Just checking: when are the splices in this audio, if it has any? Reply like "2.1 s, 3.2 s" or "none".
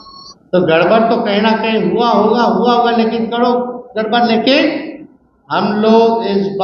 none